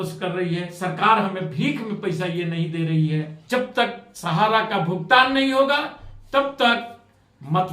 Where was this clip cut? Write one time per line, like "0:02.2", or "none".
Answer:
0:03.4